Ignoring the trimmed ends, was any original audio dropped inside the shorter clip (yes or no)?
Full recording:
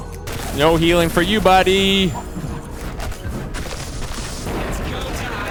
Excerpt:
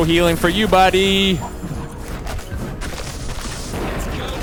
no